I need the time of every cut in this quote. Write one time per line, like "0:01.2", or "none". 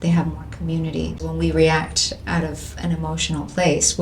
0:01.3